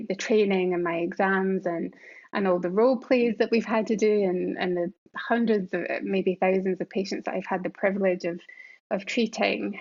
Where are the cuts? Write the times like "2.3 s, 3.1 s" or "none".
none